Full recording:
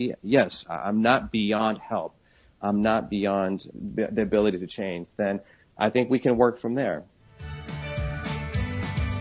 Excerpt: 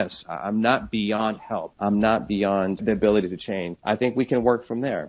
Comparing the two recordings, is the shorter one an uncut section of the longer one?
no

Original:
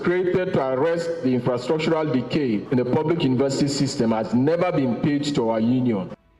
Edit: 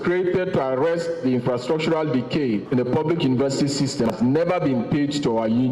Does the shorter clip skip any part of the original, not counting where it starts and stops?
yes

